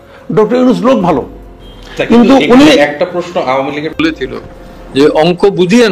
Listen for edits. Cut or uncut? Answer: cut